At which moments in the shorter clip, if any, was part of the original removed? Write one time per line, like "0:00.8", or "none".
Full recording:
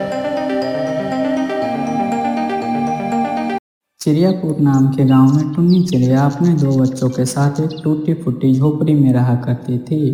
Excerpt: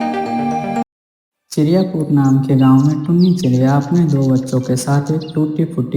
0:01.0